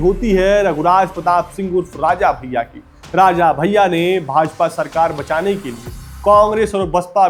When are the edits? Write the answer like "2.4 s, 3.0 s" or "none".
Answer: none